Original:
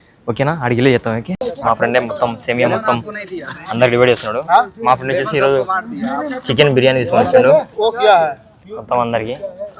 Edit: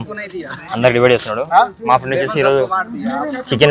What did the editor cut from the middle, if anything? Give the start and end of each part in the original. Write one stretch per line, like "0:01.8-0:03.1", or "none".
none